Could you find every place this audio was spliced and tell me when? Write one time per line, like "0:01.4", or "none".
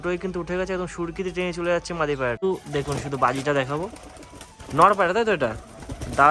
0:02.4